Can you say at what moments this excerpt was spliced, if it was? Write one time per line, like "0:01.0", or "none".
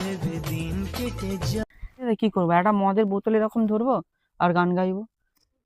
0:02.1